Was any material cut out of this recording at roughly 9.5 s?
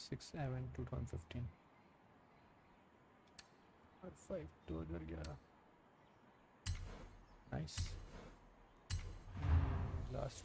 yes; 1 cut; at 9.5 s

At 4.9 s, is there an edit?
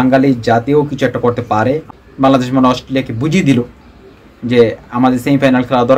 no; 1 cut; at 1.9 s

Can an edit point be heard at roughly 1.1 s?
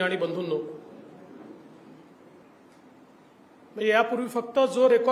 no; 1 cut; at 2.4 s

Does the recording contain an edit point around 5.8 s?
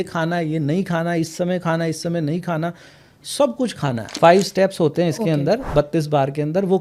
no; 1 cut; at 4.2 s

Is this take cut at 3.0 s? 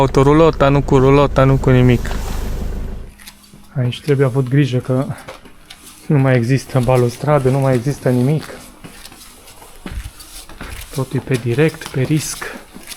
yes; 1 cut; at 3.0 s

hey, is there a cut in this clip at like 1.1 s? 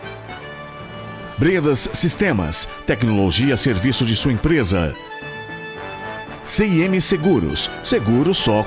yes; 1 cut; at 1.1 s

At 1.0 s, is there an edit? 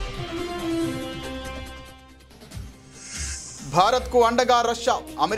no; 1 cut; at 3.5 s

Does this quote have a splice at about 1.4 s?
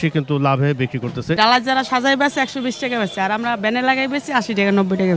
yes; 1 cut; at 1.4 s

